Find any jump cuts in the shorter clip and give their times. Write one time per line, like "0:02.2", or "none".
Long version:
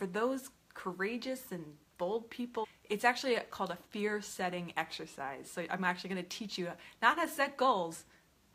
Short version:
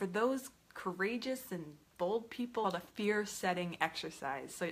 0:02.6